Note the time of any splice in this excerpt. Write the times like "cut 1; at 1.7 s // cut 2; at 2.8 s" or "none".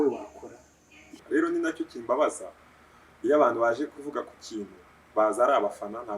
cut 1; at 1.1 s